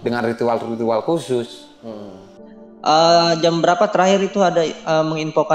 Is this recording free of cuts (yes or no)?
no